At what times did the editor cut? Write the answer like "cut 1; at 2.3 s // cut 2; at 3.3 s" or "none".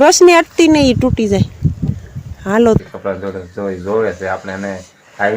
cut 1; at 2.8 s